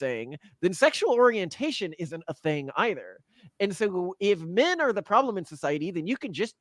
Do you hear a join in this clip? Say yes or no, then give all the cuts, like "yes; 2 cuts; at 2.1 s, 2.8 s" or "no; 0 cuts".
no; 0 cuts